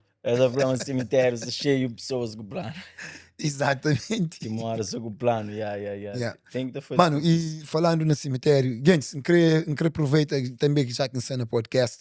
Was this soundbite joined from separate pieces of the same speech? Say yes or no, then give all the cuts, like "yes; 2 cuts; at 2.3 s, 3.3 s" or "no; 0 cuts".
no; 0 cuts